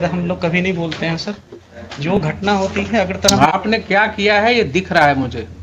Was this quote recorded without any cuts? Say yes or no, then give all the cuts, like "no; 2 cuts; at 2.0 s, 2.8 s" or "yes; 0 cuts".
yes; 0 cuts